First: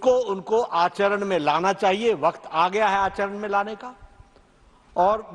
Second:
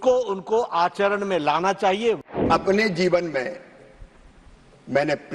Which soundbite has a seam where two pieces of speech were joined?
second; 1 cut; at 2.3 s

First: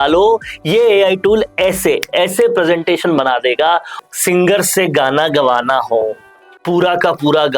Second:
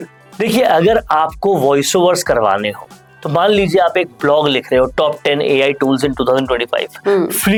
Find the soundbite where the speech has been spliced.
first; 1 cut; at 4.0 s

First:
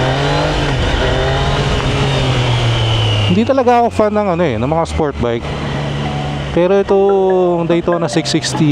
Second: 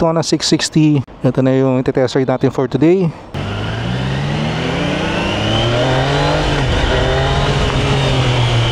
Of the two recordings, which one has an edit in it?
second; 2 cuts; at 1.1 s, 3.4 s

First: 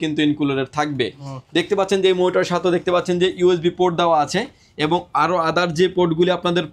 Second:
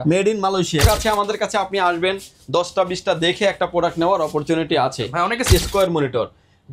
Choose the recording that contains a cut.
second; 2 cuts; at 0.8 s, 5.5 s

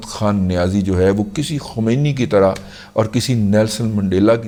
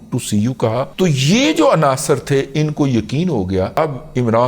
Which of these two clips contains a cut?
second; 2 cuts; at 0.9 s, 3.8 s

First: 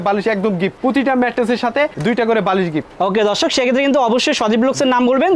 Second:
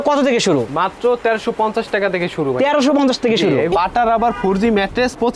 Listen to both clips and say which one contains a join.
second; 1 cut; at 3.7 s

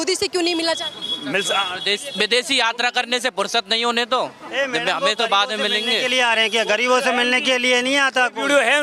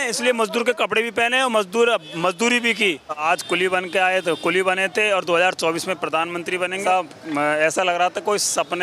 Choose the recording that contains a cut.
second; 2 cuts; at 3.2 s, 6.8 s

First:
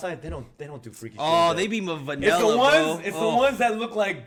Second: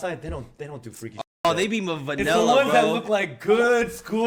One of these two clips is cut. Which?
second; 1 cut; at 2.3 s

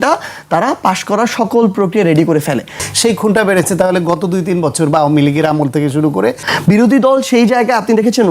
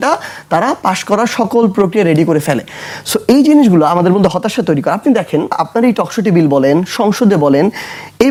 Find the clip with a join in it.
first; 2 cuts; at 2.9 s, 6.5 s

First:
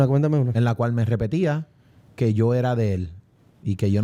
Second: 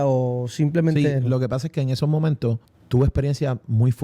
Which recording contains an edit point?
second; 1 cut; at 2.7 s

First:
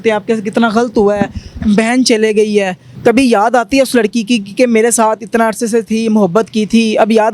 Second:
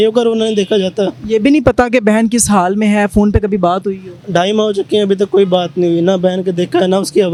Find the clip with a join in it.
first; 1 cut; at 2.8 s

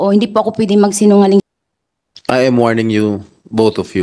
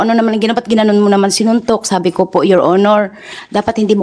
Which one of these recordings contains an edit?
first; 1 cut; at 1.4 s

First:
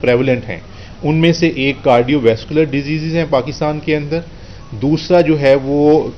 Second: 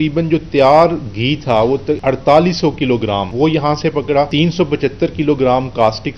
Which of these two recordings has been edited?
second; 3 cuts; at 1.9 s, 3.3 s, 4.3 s

